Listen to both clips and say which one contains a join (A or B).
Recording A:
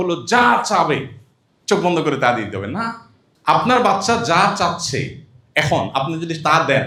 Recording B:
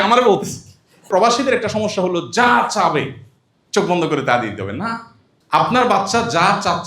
B